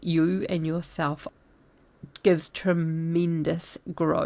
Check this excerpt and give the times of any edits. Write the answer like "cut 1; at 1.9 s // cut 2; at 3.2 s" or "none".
cut 1; at 1.3 s